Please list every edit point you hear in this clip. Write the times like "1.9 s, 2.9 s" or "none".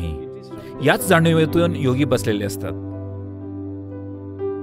2.9 s